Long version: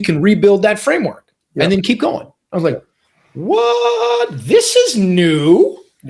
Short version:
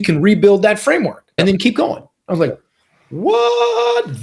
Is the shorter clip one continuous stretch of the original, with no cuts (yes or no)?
no